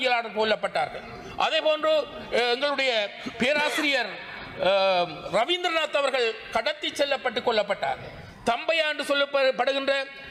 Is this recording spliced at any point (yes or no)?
no